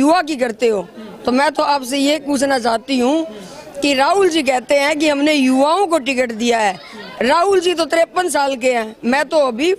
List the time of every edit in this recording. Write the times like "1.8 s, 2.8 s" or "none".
none